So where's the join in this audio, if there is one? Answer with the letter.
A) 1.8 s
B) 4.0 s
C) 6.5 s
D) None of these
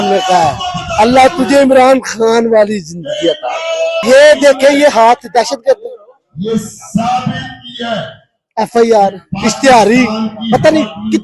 B